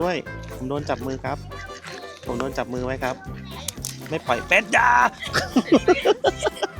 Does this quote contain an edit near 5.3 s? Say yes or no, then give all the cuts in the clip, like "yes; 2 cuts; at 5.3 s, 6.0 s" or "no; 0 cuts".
no; 1 cut; at 3.3 s